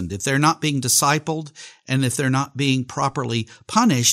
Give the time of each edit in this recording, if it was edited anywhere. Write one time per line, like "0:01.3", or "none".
none